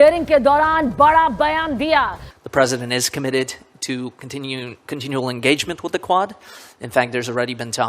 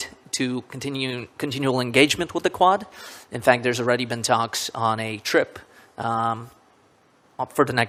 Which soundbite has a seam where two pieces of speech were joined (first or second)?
first